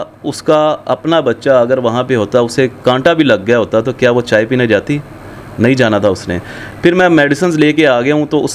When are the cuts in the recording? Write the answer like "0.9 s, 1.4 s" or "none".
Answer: none